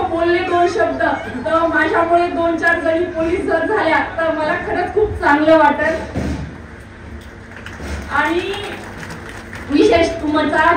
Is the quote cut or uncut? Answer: uncut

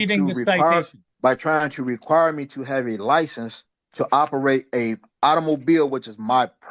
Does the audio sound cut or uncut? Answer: cut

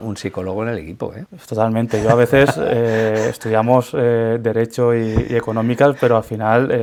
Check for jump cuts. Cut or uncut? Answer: uncut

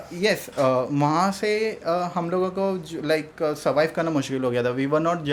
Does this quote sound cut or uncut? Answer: uncut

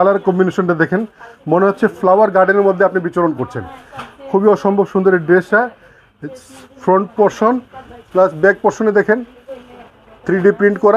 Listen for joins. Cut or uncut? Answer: uncut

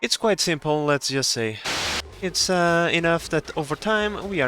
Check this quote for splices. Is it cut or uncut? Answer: cut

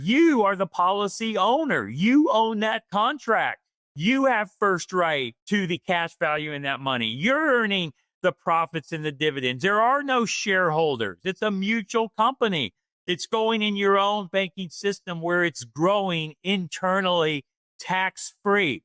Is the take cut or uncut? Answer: cut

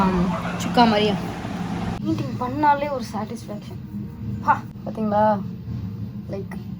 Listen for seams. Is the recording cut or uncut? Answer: cut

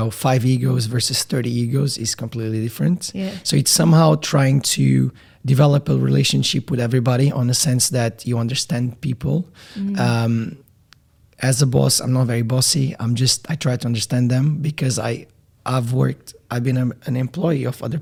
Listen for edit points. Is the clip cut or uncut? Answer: uncut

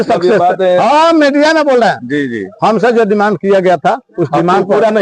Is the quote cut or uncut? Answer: uncut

